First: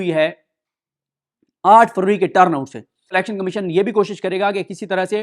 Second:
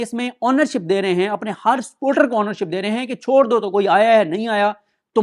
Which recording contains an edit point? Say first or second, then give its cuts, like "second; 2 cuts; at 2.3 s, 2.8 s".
first; 1 cut; at 3.2 s